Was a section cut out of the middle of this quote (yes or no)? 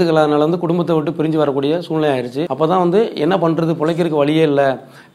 yes